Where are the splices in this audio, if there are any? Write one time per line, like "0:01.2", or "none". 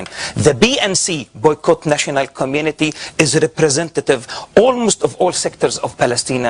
none